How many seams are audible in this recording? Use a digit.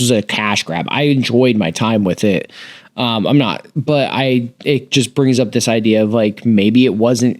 0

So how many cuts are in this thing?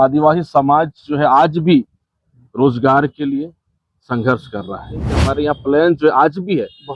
1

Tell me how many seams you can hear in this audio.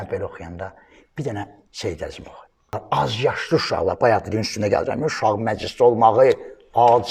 1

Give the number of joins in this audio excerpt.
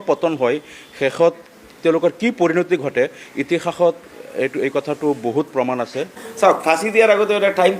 1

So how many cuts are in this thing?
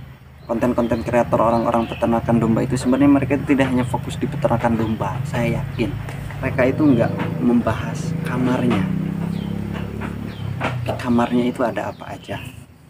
1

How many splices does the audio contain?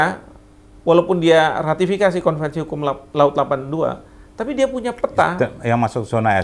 0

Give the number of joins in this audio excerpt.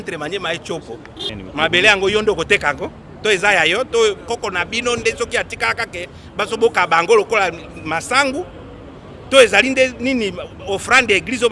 1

